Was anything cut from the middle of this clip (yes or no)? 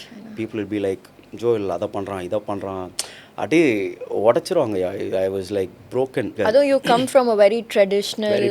yes